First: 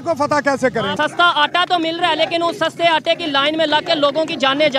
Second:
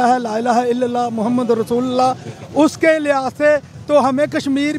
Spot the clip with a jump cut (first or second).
first